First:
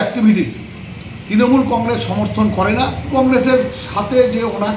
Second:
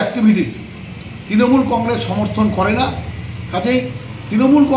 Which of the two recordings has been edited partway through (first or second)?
first